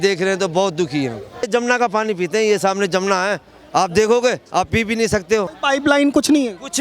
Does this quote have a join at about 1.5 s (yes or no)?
yes